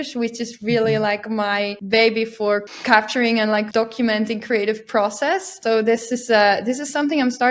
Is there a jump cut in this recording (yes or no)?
yes